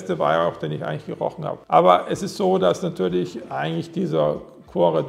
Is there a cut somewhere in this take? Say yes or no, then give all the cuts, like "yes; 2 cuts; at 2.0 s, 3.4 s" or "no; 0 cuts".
no; 0 cuts